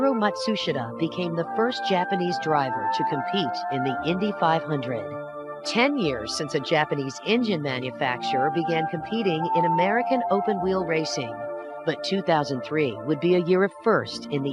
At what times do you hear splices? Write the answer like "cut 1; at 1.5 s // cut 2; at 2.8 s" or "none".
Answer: none